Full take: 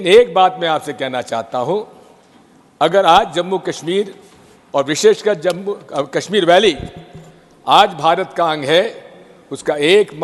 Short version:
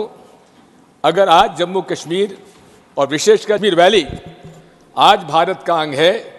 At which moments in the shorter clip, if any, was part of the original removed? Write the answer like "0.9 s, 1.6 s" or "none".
3.6 s